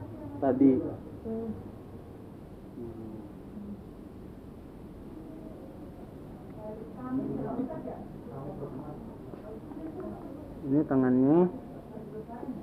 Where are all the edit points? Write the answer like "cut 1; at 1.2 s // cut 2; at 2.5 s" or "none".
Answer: none